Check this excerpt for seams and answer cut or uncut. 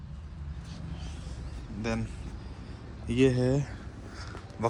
uncut